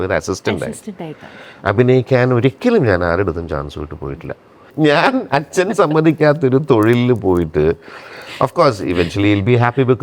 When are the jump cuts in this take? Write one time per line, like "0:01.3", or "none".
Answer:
0:04.7